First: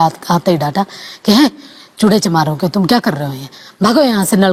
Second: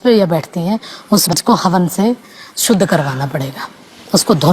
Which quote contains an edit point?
second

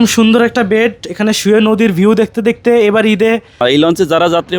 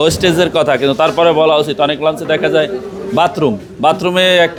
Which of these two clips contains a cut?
first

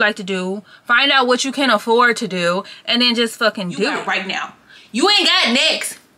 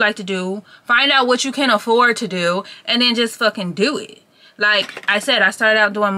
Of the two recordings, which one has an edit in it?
first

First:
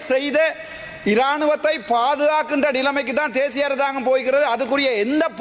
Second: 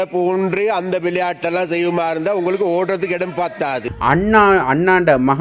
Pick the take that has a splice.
second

